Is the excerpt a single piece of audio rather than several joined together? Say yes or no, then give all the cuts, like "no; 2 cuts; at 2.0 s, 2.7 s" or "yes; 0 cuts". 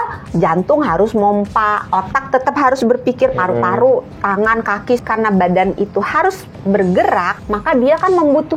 no; 2 cuts; at 5.0 s, 7.3 s